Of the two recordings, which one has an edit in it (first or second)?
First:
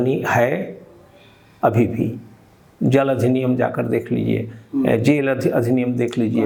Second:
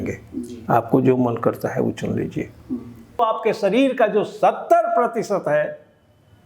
second